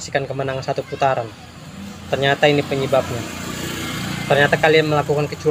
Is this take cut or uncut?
uncut